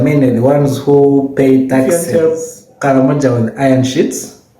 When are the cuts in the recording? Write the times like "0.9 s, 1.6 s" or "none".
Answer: 1.9 s